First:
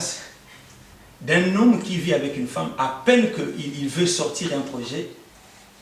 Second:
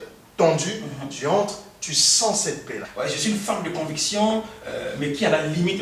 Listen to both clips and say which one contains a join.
second; 1 cut; at 2.9 s

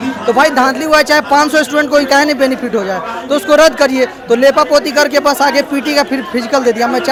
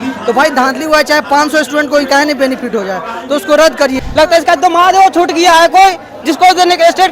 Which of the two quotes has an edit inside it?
second; 1 cut; at 4.0 s

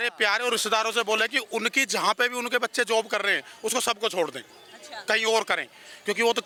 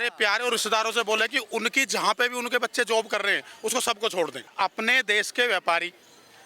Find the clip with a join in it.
second; 1 cut; at 4.5 s

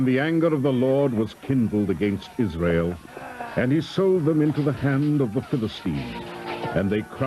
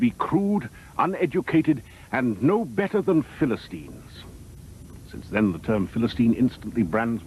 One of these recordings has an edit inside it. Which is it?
second; 1 cut; at 4.9 s

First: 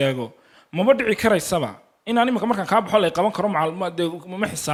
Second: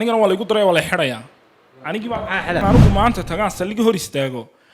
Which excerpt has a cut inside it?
second; 1 cut; at 2.6 s

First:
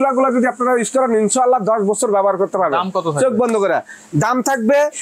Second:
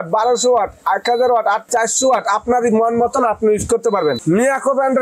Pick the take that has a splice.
second; 2 cuts; at 1.6 s, 4.2 s

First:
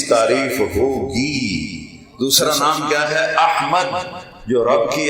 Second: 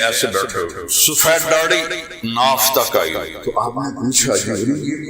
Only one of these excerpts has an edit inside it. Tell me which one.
second; 2 cuts; at 0.9 s, 3.3 s

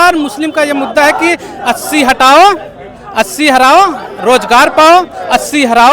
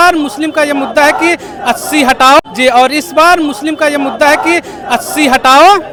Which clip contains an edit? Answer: first; 1 cut; at 2.4 s

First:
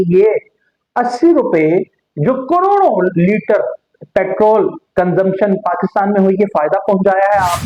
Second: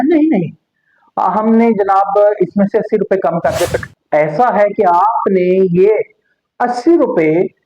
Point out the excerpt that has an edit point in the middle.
second; 1 cut; at 3.8 s

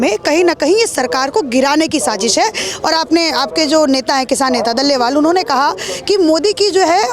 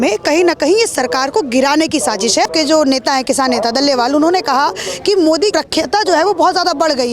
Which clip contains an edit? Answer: second; 2 cuts; at 2.5 s, 5.5 s

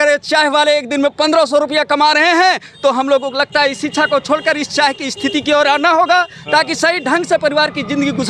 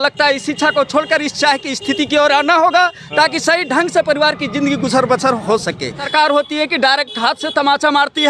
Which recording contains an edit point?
second; 1 cut; at 6.0 s

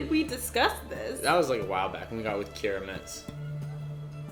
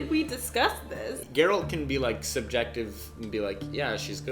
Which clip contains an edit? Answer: second; 1 cut; at 1.0 s

